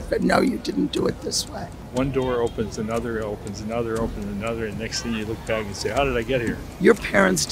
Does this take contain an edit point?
yes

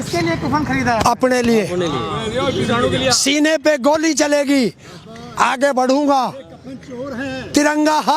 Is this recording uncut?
yes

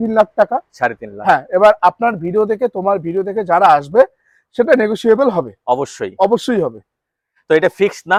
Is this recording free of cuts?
yes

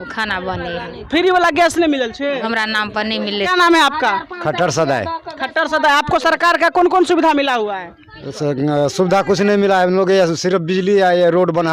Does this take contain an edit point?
no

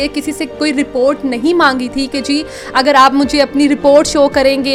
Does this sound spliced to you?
no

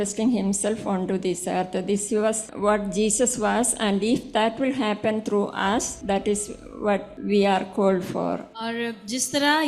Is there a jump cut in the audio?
yes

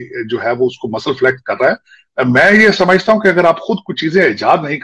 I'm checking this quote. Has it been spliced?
no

